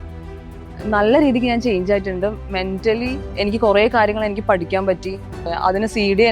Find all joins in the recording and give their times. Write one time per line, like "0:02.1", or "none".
0:03.2
0:05.5